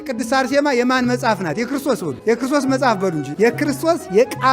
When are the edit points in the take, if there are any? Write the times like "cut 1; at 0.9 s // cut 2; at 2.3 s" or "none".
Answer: cut 1; at 2.1 s // cut 2; at 3.2 s